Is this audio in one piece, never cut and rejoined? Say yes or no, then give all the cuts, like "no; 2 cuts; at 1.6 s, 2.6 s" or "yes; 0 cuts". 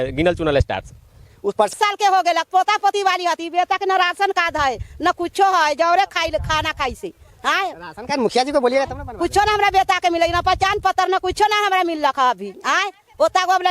no; 1 cut; at 1.7 s